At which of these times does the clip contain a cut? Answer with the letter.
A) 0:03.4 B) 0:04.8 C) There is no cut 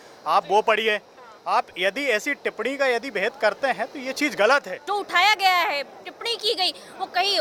B